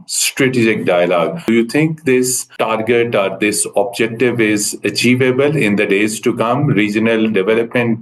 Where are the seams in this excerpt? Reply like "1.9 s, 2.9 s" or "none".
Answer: 1.5 s, 2.4 s